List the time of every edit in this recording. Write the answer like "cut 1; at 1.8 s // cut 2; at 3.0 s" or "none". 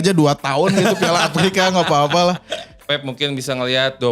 cut 1; at 2.8 s